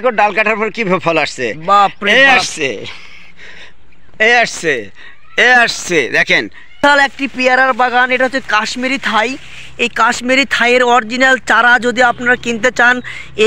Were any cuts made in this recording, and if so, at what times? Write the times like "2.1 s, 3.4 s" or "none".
6.8 s